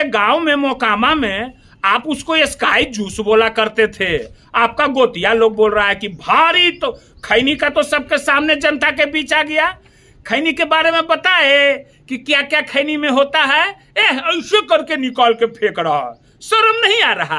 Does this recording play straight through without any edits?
yes; 0 cuts

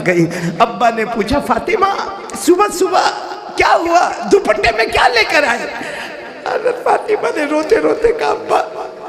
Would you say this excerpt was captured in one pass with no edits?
yes; 0 cuts

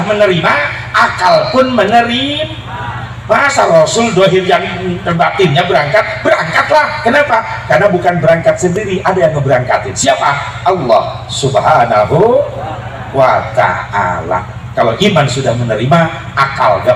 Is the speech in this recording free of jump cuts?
yes; 0 cuts

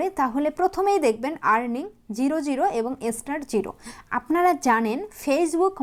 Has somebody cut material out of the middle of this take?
no; 0 cuts

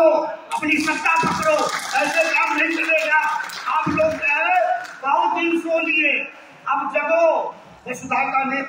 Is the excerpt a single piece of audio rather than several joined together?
yes; 0 cuts

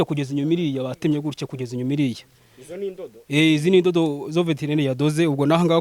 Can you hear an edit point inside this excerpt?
no; 0 cuts

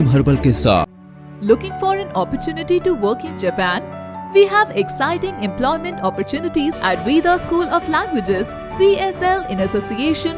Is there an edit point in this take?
yes; 2 cuts; at 0.9 s, 6.8 s

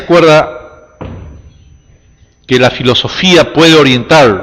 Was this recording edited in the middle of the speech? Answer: yes; 1 cut; at 3.4 s

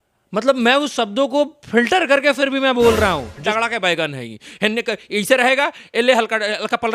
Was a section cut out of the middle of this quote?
yes; 1 cut; at 3.4 s

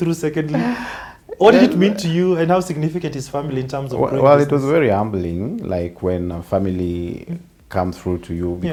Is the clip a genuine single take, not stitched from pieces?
yes; 0 cuts

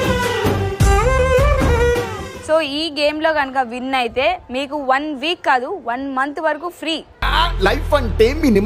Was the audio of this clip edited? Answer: yes; 1 cut; at 2.3 s

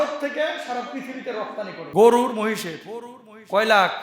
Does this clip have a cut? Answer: yes; 1 cut; at 1.8 s

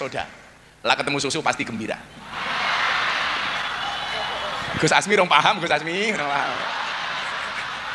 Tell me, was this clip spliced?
no; 0 cuts

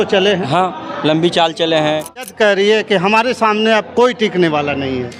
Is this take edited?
yes; 1 cut; at 2.3 s

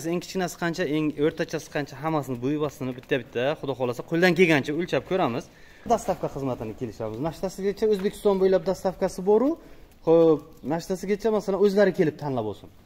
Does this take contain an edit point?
yes; 1 cut; at 5.8 s

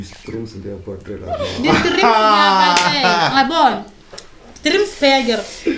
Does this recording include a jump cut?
no; 0 cuts

